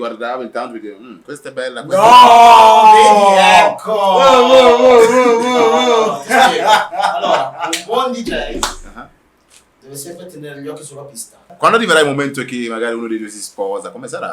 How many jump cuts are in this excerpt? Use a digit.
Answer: 1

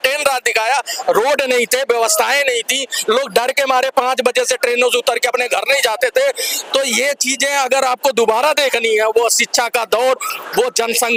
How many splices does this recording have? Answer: 0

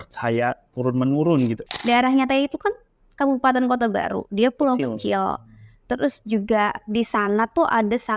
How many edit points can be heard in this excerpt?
1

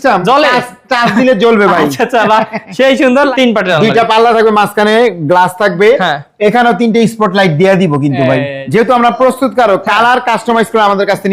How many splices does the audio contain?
2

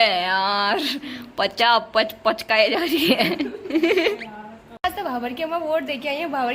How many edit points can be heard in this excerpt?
1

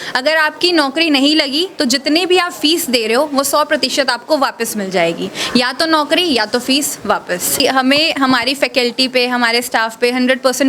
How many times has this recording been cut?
1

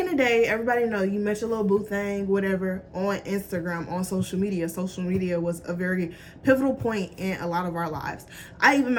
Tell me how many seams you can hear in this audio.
0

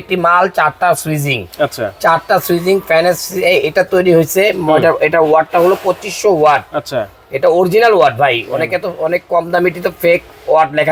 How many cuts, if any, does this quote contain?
0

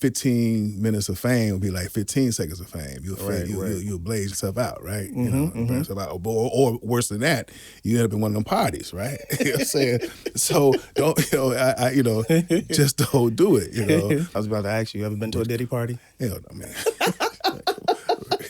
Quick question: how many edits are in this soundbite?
1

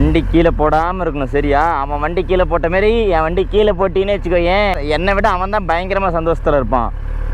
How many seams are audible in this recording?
0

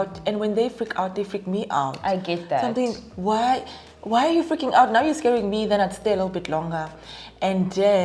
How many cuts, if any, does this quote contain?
0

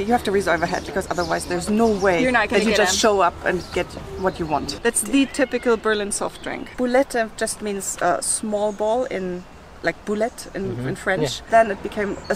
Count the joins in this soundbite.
2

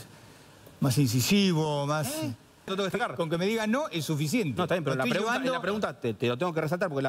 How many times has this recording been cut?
1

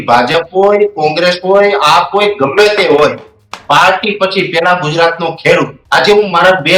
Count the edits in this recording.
1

